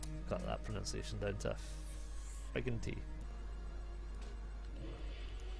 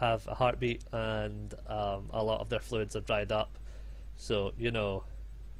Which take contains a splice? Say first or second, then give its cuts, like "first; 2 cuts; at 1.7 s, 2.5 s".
first; 1 cut; at 3.1 s